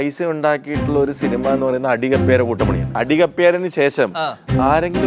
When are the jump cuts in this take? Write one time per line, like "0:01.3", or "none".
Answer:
0:03.0